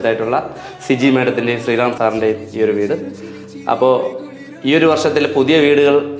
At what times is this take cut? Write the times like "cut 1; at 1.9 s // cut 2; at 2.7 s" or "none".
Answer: cut 1; at 1.9 s